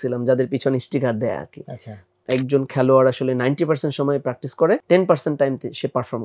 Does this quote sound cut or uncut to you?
cut